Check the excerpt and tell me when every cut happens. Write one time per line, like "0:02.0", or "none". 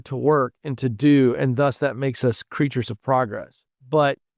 none

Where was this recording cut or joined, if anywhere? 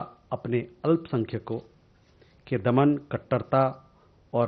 none

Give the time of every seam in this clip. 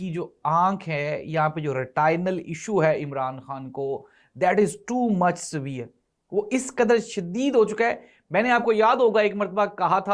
none

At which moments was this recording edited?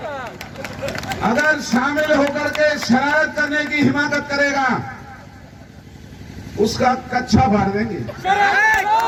none

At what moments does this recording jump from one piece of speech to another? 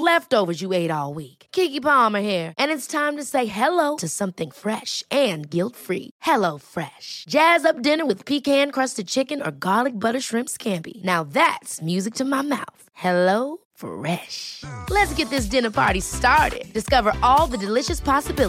none

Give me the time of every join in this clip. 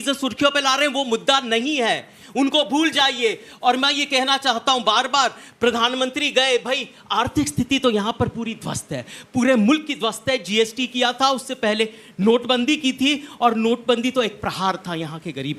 none

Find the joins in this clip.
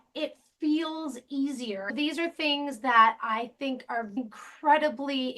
0:01.8

